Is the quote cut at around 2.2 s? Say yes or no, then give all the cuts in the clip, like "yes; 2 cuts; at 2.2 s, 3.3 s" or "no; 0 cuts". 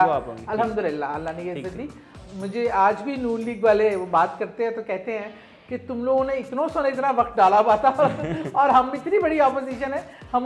yes; 1 cut; at 2.2 s